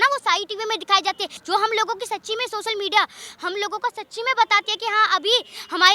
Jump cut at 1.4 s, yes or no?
yes